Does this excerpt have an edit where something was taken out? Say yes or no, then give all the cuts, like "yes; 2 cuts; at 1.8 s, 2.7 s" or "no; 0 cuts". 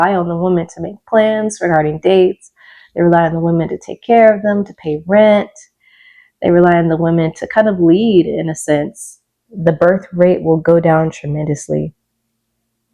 yes; 1 cut; at 9.5 s